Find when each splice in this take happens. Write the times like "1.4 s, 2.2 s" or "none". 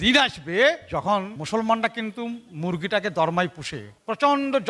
1.4 s